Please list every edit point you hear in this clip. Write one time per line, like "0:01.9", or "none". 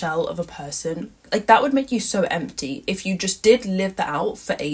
none